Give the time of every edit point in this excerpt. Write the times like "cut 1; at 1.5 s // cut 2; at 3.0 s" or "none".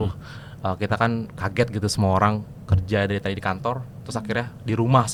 none